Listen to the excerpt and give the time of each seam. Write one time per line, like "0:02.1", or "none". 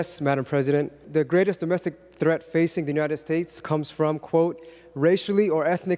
0:01.0